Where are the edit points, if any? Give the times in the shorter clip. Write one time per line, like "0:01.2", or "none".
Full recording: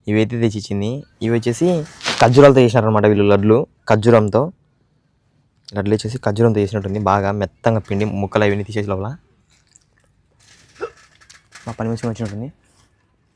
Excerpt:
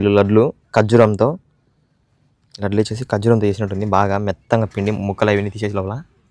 none